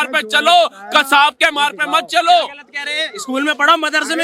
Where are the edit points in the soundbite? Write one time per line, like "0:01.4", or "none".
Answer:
none

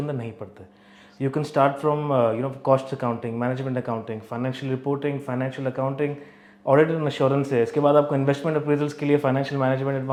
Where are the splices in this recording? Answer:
none

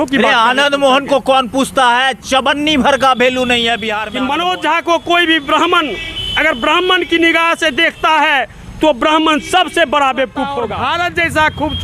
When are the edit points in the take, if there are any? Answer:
0:04.0
0:10.7

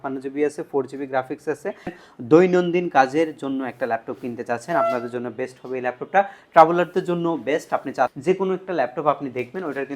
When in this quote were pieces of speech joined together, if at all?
0:02.0
0:08.1

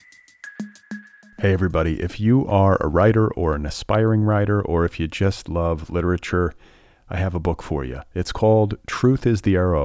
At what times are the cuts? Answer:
0:00.9

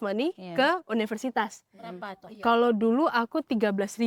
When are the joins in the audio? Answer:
none

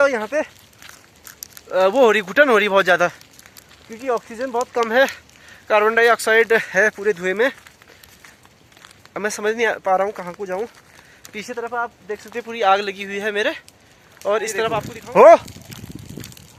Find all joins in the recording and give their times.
none

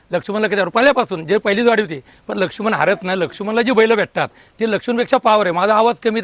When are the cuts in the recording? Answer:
none

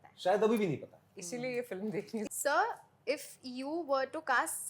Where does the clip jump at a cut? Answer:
0:02.3

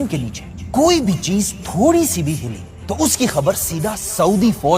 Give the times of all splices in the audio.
none

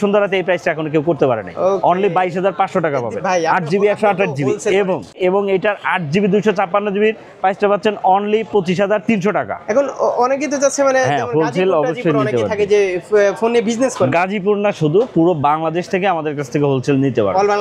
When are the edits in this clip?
none

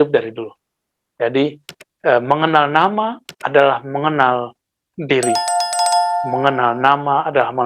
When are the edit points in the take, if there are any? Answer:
0:05.3
0:06.3

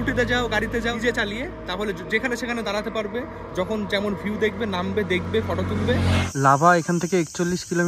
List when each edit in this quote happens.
0:01.0
0:06.2

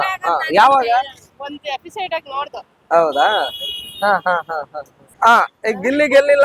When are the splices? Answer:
0:05.0

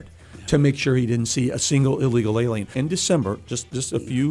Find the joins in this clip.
0:02.7

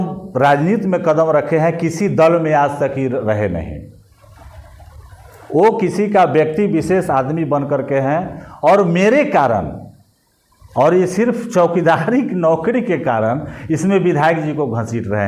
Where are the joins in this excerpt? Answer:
none

